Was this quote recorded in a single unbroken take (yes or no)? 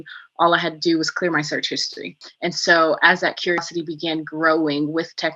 no